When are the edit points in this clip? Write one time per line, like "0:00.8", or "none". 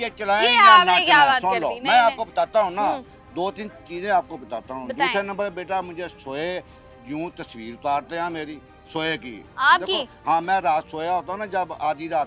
none